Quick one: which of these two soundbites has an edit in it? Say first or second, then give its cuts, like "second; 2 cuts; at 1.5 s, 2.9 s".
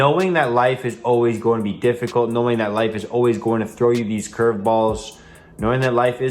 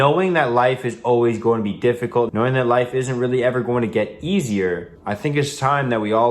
second; 2 cuts; at 2.3 s, 4.9 s